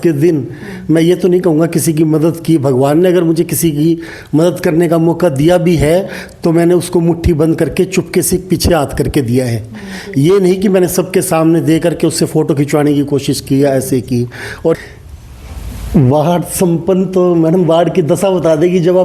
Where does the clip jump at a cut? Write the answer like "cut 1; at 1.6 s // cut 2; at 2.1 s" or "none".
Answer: cut 1; at 14.7 s